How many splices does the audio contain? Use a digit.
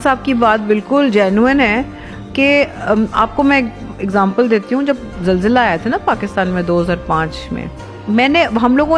0